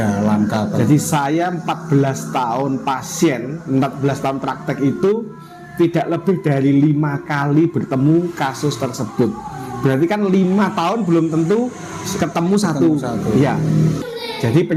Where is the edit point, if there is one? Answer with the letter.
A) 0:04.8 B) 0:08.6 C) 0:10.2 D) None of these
D